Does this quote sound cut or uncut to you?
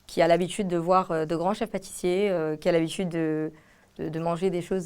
uncut